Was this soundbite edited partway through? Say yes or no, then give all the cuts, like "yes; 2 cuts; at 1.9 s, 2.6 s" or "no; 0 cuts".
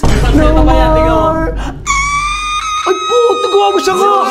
no; 0 cuts